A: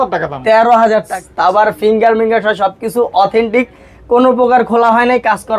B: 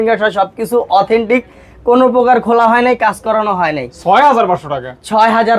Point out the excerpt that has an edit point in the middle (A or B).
A